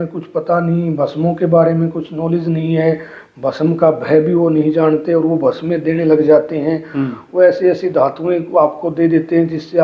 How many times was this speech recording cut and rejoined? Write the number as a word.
zero